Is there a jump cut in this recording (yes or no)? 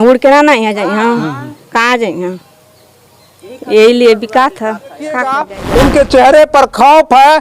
yes